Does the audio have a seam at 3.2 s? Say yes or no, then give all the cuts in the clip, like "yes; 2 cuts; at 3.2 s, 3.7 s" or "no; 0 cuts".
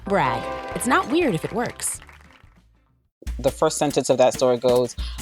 yes; 1 cut; at 3.2 s